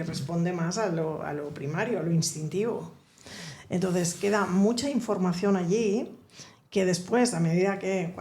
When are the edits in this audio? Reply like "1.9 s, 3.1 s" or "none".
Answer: none

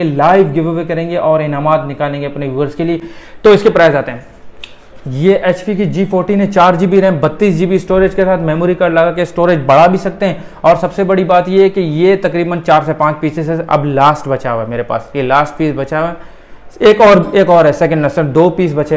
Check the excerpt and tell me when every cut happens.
none

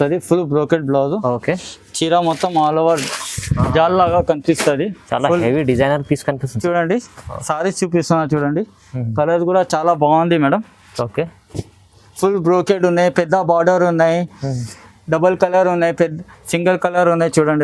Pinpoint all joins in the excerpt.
6.5 s

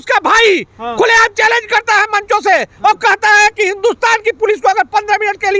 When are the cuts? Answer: none

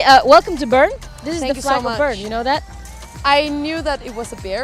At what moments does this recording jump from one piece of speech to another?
0.9 s

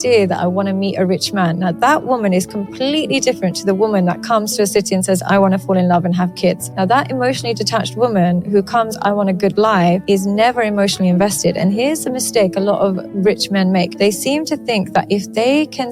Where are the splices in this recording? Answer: 6.7 s, 10.0 s, 13.9 s

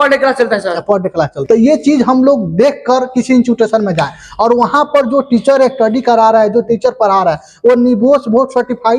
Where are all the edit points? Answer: 1.4 s

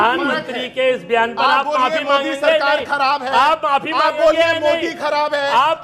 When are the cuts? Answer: none

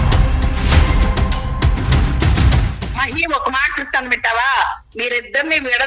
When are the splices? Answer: 2.4 s

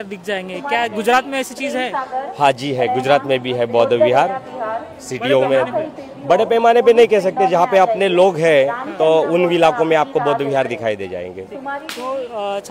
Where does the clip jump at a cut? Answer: none

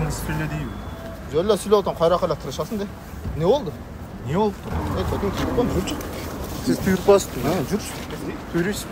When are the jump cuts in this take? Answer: 4.7 s

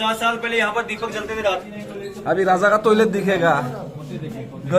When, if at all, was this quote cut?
1.7 s

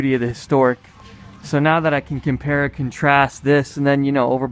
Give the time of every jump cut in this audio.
none

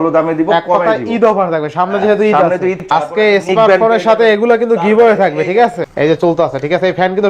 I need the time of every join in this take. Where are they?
2.8 s, 5.8 s

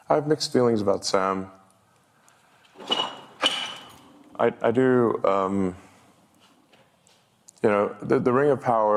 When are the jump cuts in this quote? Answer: none

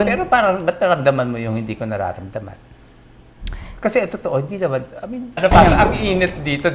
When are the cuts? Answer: 5.4 s

